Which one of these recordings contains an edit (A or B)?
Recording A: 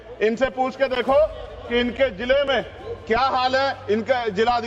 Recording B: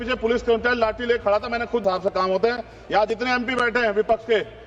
B